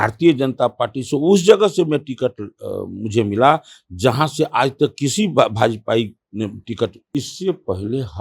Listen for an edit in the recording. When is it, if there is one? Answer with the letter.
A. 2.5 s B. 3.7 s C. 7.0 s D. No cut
C